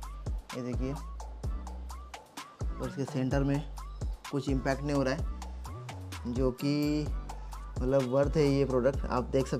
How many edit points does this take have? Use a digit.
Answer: 0